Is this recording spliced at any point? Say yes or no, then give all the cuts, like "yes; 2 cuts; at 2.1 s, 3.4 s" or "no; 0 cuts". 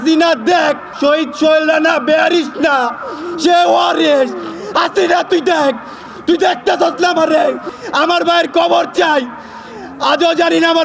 yes; 2 cuts; at 0.9 s, 7.7 s